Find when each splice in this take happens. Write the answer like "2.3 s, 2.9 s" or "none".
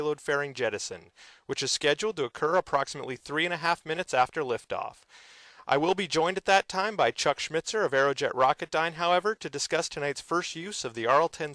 none